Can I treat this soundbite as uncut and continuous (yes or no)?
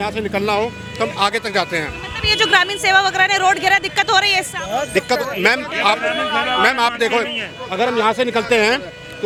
yes